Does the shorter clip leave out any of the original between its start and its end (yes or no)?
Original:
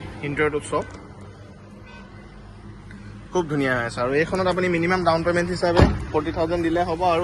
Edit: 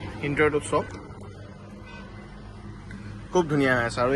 no